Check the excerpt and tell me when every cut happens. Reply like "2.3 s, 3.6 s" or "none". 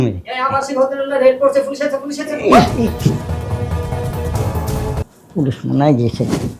5.0 s